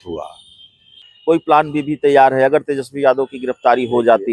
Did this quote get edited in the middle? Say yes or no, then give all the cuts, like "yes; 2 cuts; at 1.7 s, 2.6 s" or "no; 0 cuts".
yes; 1 cut; at 1.0 s